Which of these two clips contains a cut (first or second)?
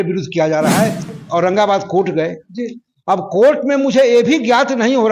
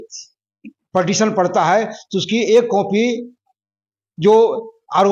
first